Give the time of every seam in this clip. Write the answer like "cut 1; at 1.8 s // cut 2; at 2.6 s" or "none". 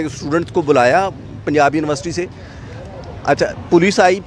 none